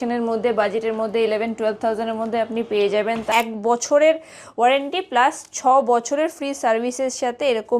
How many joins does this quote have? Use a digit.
1